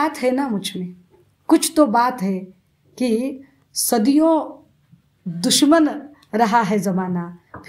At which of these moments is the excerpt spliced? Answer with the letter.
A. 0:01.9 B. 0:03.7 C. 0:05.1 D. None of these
D